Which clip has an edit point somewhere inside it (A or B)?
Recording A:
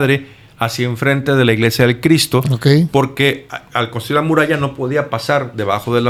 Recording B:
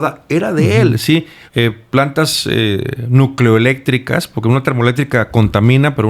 B